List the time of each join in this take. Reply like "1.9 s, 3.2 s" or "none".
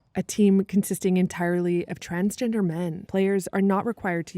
3.0 s